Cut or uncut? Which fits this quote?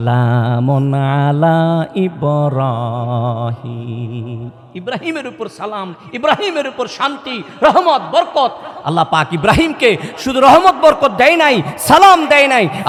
uncut